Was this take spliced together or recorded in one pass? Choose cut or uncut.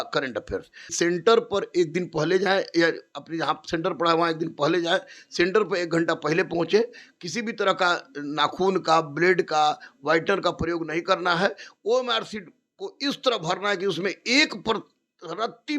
cut